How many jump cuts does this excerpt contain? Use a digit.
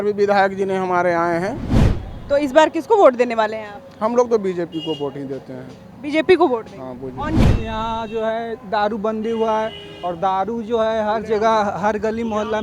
2